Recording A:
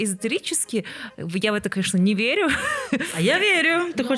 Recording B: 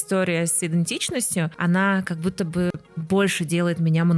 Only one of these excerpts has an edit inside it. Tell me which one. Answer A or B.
B